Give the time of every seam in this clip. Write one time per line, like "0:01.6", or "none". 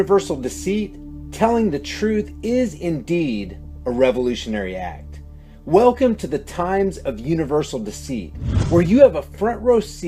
none